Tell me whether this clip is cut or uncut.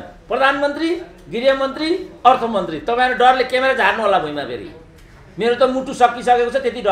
uncut